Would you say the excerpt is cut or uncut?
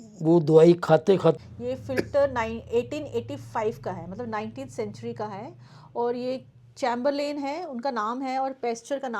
cut